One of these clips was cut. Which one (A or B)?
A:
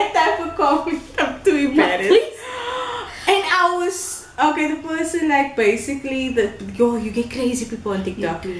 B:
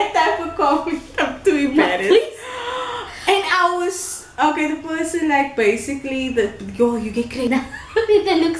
B